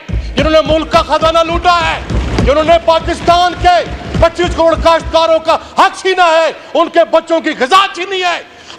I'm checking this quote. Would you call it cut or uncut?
uncut